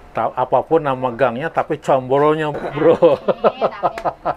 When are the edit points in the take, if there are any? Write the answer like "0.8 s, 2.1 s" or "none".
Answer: 2.5 s